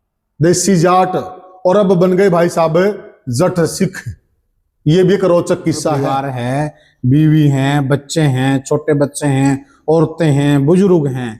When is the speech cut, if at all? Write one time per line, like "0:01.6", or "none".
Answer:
0:06.0